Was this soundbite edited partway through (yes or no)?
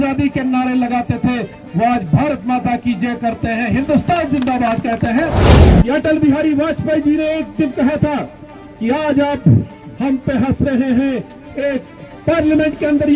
yes